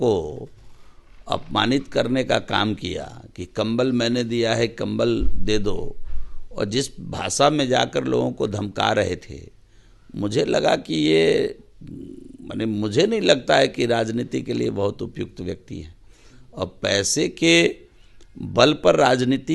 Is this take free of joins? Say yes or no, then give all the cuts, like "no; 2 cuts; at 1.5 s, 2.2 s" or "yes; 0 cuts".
yes; 0 cuts